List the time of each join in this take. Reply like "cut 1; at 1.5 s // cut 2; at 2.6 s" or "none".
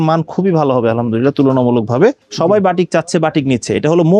cut 1; at 2.2 s